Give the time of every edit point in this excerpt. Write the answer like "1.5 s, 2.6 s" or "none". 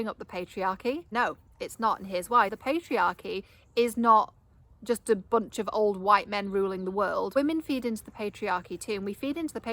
1.1 s, 2.6 s, 7.3 s